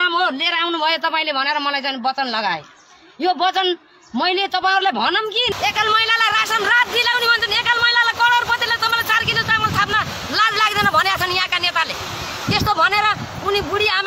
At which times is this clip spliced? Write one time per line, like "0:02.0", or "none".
0:05.5